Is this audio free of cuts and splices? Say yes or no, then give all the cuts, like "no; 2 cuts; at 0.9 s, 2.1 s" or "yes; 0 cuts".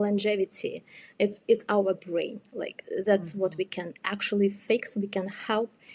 yes; 0 cuts